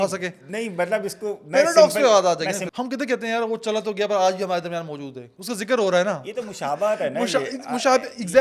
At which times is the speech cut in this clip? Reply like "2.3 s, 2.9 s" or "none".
2.7 s